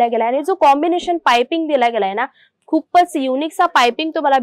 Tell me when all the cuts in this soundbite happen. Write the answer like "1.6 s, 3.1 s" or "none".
none